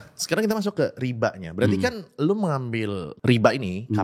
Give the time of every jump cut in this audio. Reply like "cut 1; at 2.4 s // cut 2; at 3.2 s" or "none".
cut 1; at 3.1 s